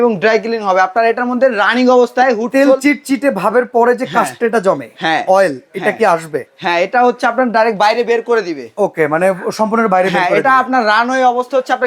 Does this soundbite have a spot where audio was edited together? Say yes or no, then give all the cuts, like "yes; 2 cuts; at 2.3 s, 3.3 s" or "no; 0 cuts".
no; 0 cuts